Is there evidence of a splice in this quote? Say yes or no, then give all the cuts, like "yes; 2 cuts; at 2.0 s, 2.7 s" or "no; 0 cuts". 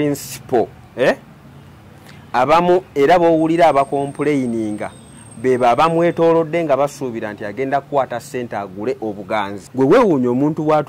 yes; 1 cut; at 9.6 s